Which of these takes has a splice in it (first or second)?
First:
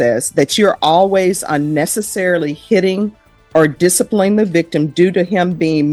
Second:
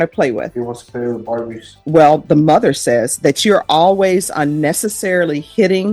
second